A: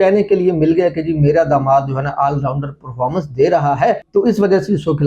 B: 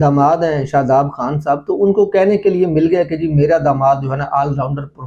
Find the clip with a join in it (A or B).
A